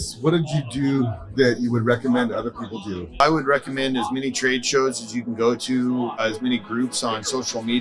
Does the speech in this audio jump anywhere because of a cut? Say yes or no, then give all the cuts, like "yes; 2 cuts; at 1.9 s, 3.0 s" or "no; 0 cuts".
yes; 3 cuts; at 1.0 s, 3.2 s, 6.2 s